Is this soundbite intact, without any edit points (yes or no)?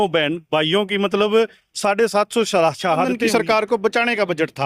no